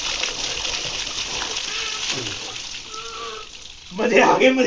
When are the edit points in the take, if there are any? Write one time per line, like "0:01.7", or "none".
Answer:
none